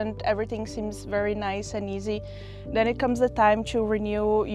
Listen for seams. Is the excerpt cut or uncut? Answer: uncut